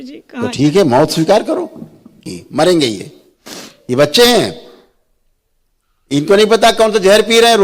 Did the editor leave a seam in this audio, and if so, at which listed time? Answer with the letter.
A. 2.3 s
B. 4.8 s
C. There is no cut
A